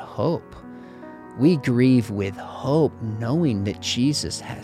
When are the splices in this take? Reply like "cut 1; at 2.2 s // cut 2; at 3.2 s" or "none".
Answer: none